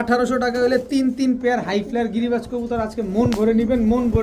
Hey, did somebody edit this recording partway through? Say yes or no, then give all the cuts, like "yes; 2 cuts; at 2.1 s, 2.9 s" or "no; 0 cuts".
no; 0 cuts